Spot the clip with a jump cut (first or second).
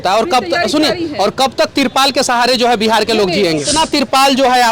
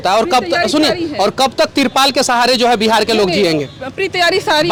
first